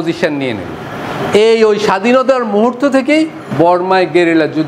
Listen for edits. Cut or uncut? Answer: cut